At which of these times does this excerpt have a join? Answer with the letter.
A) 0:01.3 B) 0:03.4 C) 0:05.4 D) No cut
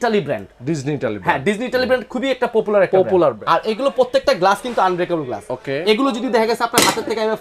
B